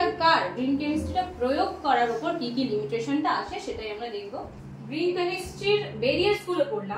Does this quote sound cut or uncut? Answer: cut